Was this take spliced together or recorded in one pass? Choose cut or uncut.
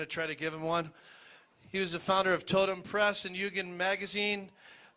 uncut